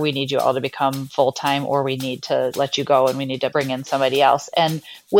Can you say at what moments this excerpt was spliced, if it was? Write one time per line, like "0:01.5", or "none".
0:01.0
0:02.5
0:03.5

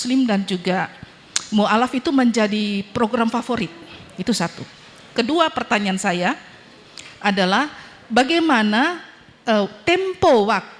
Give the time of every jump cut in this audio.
none

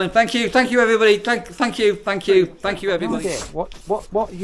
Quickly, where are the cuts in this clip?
0:03.0

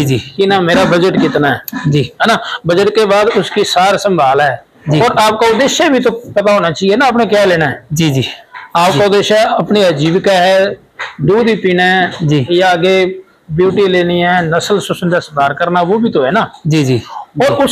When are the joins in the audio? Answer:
none

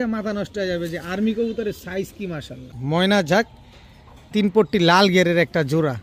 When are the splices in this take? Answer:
0:02.7

